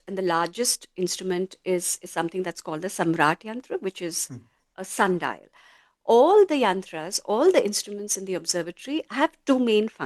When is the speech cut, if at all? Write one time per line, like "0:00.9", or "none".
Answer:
0:05.8